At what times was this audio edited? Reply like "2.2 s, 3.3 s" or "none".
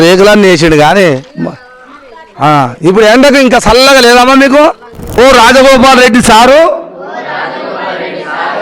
5.0 s